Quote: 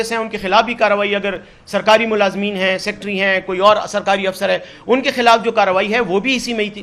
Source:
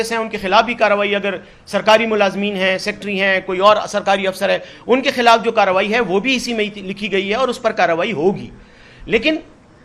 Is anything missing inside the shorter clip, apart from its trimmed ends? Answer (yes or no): no